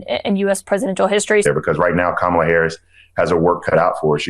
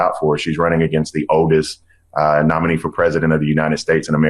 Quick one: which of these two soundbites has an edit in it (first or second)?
first